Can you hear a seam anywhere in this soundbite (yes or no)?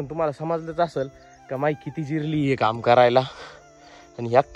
no